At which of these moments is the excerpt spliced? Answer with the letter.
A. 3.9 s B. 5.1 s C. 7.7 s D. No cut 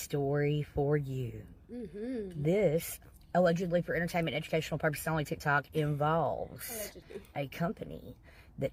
D